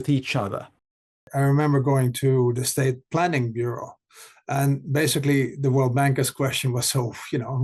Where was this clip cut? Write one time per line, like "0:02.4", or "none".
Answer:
0:01.3
0:02.5